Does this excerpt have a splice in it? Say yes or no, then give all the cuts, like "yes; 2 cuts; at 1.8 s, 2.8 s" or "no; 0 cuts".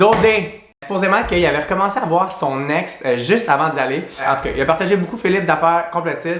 yes; 2 cuts; at 0.8 s, 4.1 s